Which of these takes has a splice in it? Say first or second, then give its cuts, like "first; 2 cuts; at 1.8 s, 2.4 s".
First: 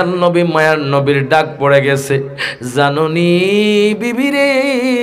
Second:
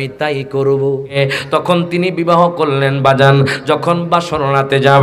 second; 1 cut; at 1.1 s